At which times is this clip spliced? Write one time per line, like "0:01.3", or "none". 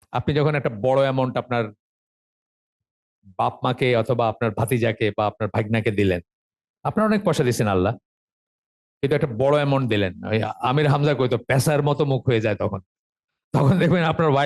none